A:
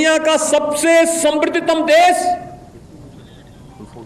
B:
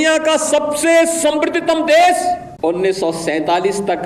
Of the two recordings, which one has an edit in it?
B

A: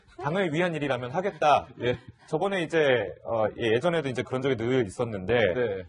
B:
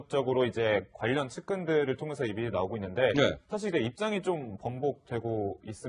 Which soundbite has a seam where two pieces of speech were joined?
B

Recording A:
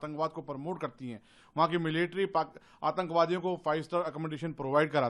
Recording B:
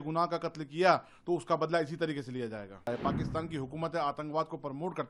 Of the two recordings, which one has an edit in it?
B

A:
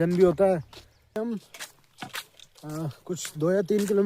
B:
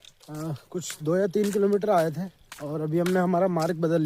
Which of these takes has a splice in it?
A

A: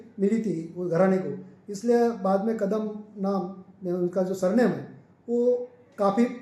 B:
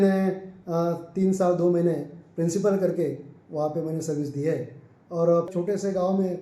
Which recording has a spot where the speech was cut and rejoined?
B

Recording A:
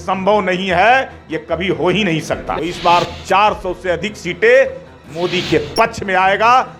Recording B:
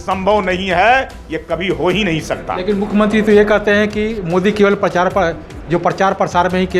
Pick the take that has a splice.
A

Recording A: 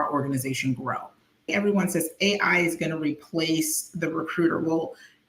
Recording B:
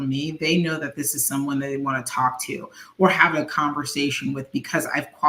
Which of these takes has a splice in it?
A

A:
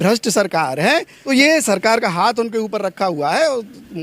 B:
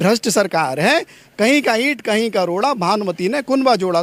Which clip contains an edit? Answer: A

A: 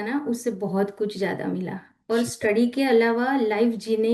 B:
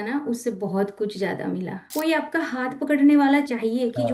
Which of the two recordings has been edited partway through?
B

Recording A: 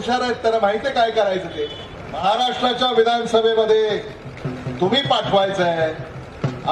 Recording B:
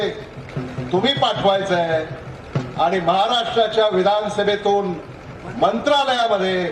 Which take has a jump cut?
A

